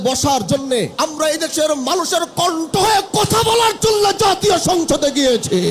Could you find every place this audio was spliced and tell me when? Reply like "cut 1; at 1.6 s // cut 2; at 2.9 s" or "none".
cut 1; at 0.9 s